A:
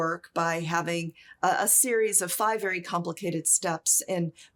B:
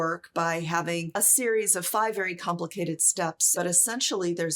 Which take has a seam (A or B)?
B